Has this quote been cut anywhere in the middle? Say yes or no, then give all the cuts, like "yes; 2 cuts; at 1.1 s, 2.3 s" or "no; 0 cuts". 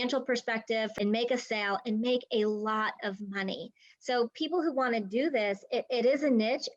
yes; 1 cut; at 0.9 s